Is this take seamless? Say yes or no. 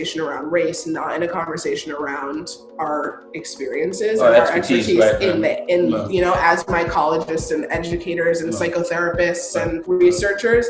no